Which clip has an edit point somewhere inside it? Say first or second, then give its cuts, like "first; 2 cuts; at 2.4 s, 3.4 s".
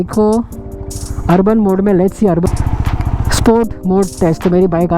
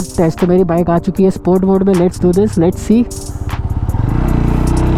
first; 1 cut; at 2.5 s